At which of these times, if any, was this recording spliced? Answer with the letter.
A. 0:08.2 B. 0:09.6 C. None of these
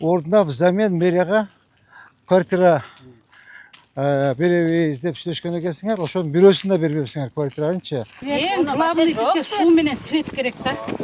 A